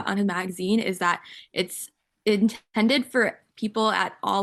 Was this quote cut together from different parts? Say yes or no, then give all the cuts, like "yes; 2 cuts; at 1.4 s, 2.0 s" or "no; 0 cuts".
no; 0 cuts